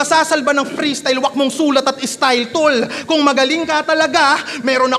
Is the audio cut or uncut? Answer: uncut